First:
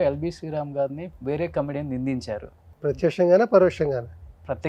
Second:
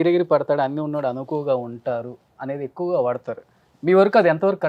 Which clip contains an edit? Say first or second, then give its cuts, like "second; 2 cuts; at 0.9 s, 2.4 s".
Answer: first; 2 cuts; at 1.1 s, 2.6 s